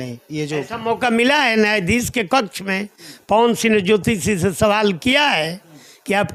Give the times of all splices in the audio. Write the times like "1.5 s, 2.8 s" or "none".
none